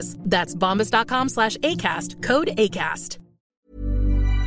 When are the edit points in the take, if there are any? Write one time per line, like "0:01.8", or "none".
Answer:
0:03.4